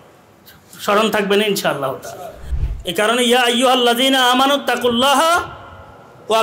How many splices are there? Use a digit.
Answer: 1